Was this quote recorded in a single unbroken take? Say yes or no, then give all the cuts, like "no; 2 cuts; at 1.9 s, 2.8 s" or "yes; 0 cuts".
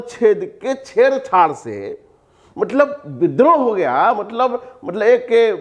yes; 0 cuts